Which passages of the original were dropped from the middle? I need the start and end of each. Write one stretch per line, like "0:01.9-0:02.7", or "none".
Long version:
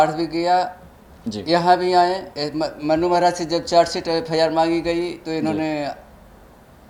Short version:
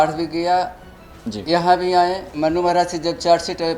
0:02.3-0:02.7

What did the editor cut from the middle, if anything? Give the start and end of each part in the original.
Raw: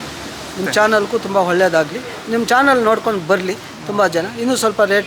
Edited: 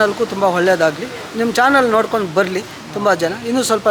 none

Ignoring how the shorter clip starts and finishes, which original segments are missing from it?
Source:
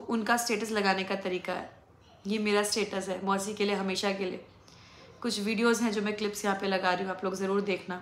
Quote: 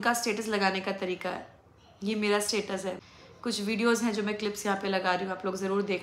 0:03.2-0:04.8

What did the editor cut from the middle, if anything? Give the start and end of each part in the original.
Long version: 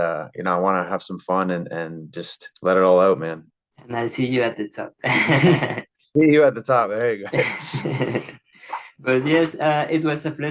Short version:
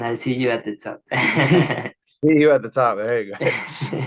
none

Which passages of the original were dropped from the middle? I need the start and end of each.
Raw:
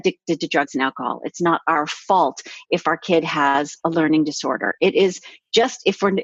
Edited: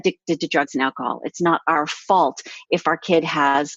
none

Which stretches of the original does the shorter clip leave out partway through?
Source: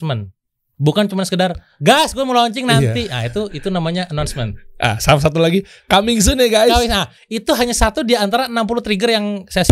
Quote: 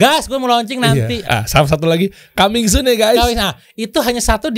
0:03.1-0:04.7

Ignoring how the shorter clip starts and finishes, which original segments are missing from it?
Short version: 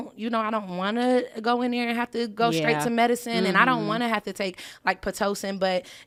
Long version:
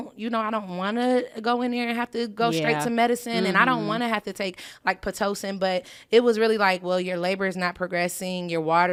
none

